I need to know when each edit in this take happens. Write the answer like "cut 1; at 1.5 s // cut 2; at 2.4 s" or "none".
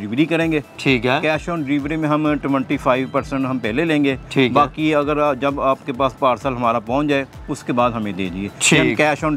none